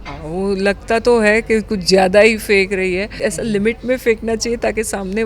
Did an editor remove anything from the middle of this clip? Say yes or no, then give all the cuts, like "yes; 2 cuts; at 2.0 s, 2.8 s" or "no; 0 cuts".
yes; 1 cut; at 3.2 s